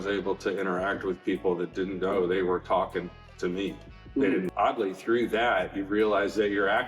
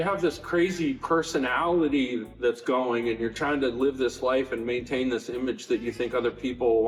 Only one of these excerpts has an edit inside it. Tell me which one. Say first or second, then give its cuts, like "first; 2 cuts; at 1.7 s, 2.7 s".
first; 1 cut; at 4.5 s